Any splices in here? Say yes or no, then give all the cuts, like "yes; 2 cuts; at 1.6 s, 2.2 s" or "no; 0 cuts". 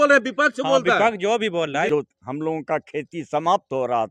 yes; 1 cut; at 1.9 s